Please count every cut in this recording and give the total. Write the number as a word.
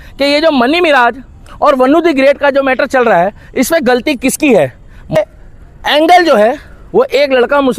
one